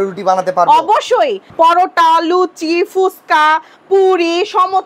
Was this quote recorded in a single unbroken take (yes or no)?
no